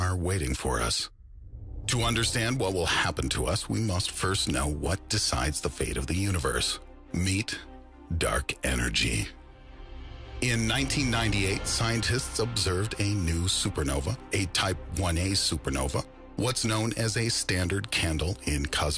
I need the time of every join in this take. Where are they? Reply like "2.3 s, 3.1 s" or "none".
1.2 s